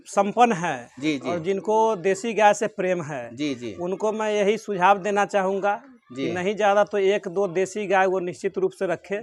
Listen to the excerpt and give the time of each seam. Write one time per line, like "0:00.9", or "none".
none